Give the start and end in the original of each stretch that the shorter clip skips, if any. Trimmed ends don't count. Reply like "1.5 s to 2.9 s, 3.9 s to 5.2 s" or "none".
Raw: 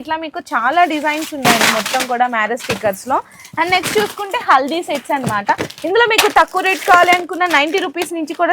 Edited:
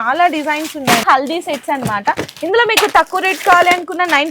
1.6 s to 4.4 s